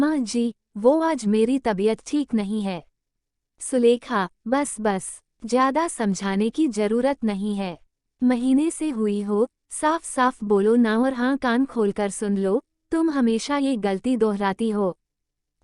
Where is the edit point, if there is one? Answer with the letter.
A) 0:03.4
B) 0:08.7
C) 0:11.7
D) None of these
A